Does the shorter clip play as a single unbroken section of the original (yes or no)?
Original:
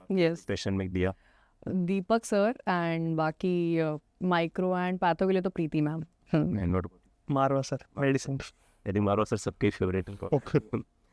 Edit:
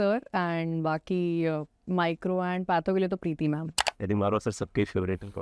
no